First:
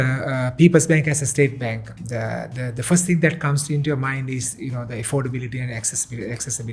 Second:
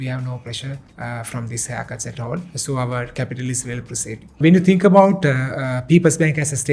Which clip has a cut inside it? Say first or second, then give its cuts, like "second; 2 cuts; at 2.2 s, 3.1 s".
second; 3 cuts; at 0.9 s, 2.5 s, 4.4 s